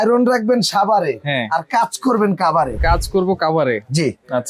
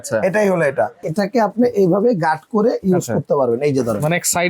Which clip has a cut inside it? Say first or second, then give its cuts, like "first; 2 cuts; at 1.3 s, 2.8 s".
second; 1 cut; at 1.0 s